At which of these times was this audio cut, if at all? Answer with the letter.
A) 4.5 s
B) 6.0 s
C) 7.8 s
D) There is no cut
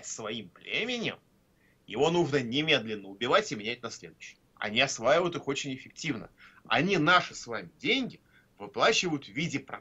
A